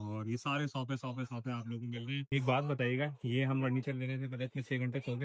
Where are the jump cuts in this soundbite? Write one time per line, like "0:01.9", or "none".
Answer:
0:02.3